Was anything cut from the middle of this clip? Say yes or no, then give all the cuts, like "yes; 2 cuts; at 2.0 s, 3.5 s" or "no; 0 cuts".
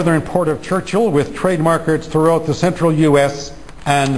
no; 0 cuts